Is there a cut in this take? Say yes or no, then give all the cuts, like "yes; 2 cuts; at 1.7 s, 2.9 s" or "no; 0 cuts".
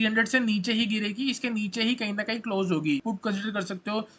yes; 1 cut; at 3.0 s